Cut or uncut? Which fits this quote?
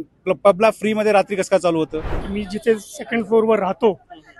cut